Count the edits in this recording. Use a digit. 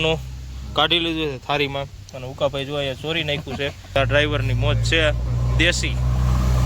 1